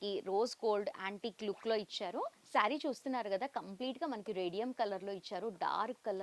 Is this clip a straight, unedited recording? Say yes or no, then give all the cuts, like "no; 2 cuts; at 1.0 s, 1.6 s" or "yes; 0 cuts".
no; 1 cut; at 2.4 s